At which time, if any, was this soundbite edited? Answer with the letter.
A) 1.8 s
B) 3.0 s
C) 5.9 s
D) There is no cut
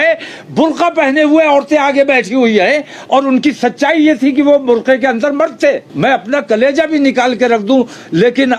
C